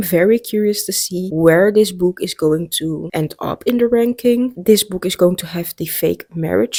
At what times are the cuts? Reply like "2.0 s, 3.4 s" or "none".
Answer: none